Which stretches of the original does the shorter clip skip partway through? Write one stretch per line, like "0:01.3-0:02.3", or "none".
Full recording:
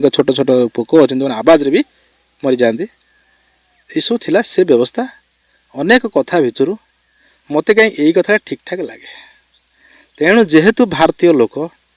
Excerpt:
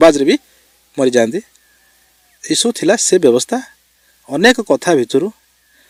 none